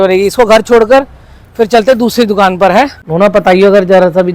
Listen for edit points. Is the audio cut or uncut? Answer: cut